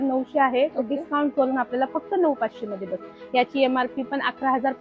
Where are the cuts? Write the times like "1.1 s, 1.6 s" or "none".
3.0 s

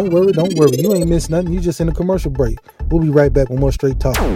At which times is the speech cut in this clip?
1.1 s

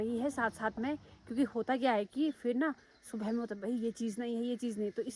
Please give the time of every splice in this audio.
none

